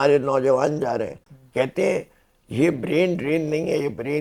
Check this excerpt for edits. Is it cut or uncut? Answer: uncut